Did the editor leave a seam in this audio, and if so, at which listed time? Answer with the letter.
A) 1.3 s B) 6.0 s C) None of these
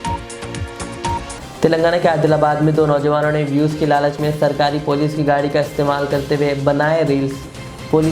A